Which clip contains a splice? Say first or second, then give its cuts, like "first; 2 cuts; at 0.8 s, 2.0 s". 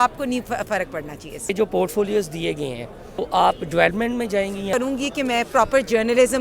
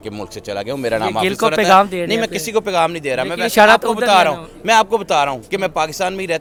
first; 3 cuts; at 1.5 s, 3.2 s, 4.7 s